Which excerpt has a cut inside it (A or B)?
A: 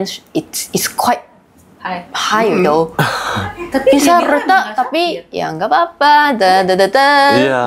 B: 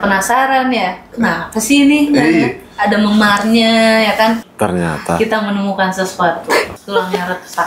B